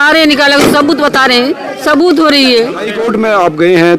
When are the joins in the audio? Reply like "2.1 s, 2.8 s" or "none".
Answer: 2.9 s